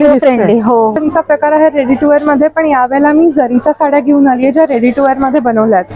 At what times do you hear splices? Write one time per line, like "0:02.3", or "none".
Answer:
0:01.0